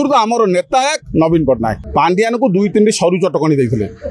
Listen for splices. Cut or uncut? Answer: cut